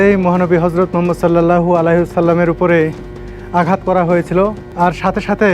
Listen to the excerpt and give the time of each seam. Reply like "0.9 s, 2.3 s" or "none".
4.6 s